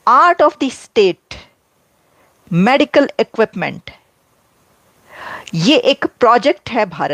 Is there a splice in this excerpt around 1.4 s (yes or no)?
no